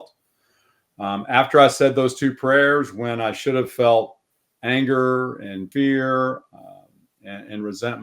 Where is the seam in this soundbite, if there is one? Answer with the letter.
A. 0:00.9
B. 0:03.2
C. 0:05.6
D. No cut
C